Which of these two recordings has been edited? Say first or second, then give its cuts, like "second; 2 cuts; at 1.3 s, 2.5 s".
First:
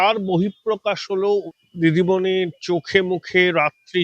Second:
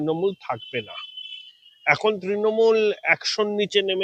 first; 1 cut; at 1.5 s